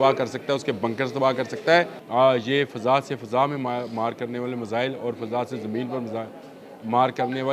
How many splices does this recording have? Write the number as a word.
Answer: one